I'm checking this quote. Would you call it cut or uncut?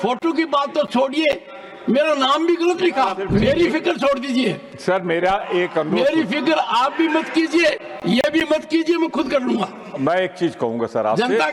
cut